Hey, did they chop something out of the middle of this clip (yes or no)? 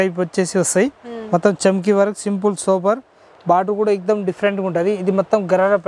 no